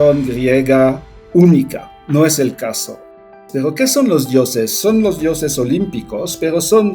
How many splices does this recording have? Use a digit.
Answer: 2